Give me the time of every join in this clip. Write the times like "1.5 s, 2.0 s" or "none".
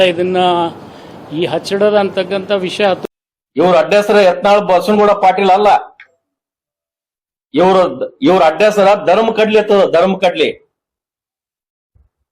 3.1 s